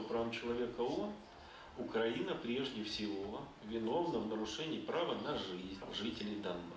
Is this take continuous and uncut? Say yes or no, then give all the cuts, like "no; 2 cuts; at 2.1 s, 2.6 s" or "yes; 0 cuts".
no; 1 cut; at 5.9 s